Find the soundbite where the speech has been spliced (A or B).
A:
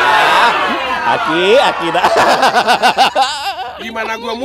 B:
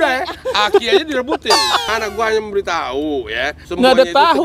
B